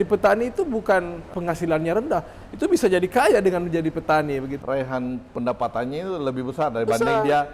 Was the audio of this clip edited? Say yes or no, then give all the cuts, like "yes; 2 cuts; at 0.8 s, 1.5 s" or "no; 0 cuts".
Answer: yes; 2 cuts; at 1.2 s, 4.5 s